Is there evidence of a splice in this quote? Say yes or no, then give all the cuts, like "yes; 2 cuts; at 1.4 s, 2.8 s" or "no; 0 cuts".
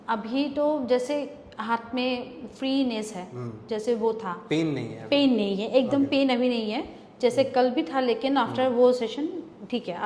no; 0 cuts